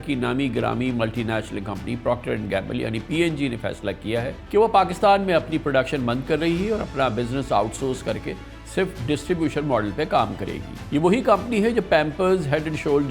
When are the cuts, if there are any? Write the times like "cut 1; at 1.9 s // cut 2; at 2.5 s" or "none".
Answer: none